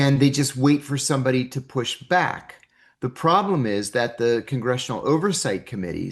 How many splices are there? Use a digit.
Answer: 0